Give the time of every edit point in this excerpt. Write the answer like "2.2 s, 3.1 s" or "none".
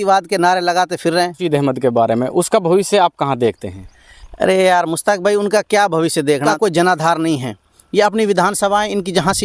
1.4 s, 6.5 s

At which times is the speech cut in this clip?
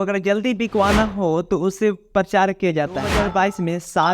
3.1 s

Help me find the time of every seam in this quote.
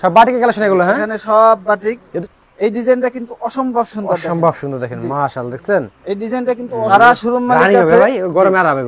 2.1 s, 6.9 s

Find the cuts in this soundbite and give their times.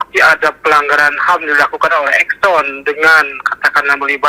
none

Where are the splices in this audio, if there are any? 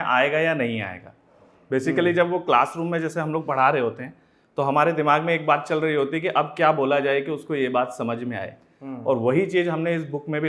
none

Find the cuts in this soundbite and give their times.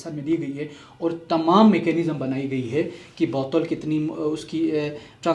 none

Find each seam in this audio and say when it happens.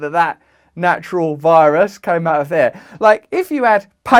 none

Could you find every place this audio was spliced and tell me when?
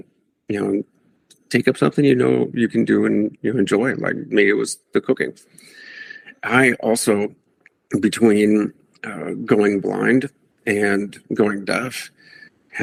none

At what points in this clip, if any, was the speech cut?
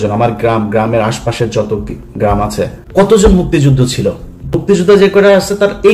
2.8 s, 4.6 s

